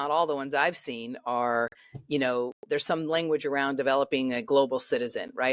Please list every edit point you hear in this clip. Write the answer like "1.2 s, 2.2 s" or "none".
none